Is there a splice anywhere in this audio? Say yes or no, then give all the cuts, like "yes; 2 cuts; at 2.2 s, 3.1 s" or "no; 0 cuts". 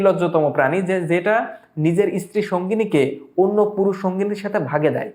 no; 0 cuts